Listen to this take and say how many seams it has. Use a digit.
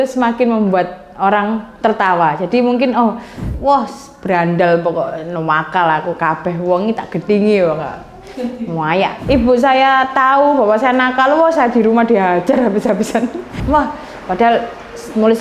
3